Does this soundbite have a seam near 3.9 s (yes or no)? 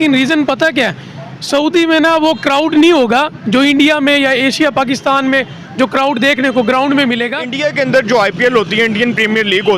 no